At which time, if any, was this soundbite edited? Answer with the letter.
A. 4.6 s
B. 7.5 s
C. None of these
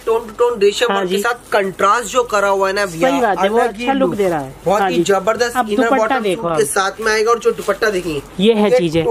C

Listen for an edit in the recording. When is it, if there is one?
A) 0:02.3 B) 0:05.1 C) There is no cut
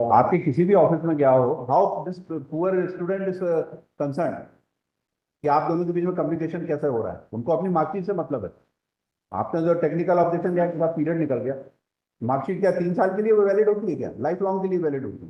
C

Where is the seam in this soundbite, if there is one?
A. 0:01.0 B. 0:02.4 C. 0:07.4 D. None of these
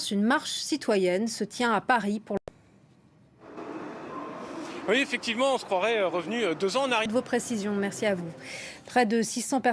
B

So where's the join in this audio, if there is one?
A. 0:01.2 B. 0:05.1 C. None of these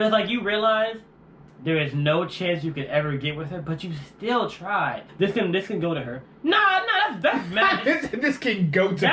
B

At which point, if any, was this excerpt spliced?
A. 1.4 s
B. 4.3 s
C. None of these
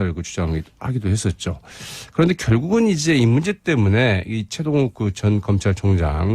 B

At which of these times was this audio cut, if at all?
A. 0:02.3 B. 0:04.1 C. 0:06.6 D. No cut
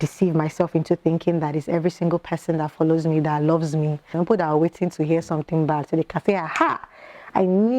B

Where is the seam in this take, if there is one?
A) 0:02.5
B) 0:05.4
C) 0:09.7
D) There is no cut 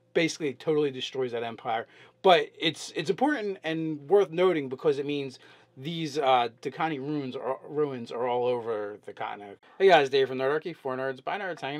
D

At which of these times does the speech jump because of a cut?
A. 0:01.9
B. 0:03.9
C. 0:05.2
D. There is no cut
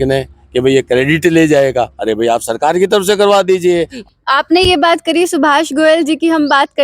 B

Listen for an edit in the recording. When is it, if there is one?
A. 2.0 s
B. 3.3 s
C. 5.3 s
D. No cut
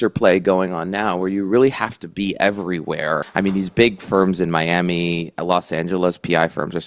B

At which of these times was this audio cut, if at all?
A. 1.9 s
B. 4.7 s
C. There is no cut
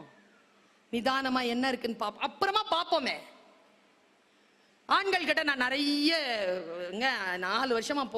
B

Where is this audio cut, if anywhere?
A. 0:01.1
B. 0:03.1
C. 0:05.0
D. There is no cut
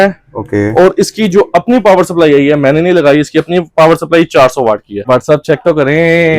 C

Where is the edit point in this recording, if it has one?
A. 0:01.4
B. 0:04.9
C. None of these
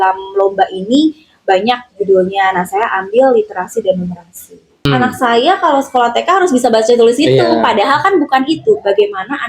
B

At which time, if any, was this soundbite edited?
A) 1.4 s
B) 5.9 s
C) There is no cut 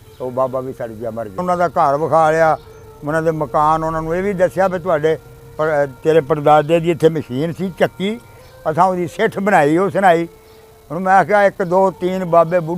A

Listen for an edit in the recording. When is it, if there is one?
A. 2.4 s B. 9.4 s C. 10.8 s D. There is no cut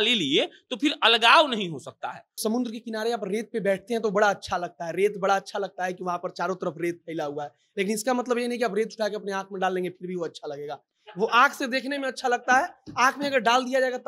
A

